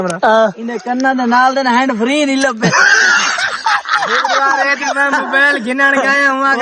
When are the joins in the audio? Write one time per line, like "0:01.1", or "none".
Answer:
none

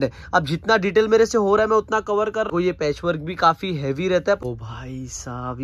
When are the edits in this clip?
0:02.5
0:04.4

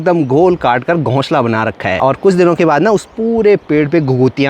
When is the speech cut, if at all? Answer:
0:02.0

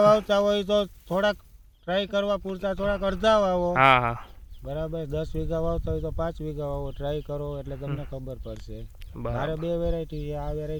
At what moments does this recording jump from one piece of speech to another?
none

